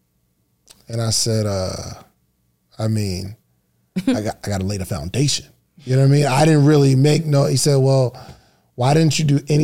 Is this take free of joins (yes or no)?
yes